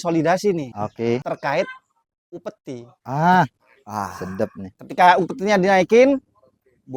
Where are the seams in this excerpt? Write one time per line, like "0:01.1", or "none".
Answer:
none